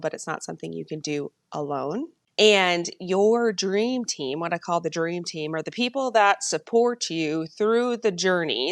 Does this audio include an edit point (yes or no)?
yes